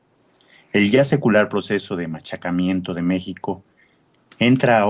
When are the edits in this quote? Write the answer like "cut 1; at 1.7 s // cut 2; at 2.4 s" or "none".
cut 1; at 3.8 s